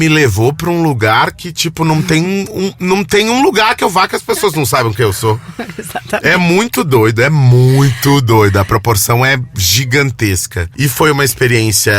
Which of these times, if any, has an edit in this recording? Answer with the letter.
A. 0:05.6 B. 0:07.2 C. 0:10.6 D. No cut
C